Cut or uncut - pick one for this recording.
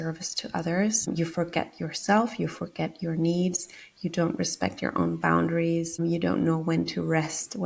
uncut